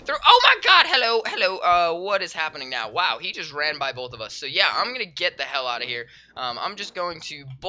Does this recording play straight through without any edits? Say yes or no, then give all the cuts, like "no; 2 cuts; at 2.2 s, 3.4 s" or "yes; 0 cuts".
yes; 0 cuts